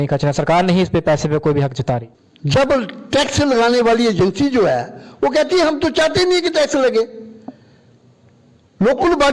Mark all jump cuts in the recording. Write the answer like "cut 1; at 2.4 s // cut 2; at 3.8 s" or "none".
cut 1; at 2.1 s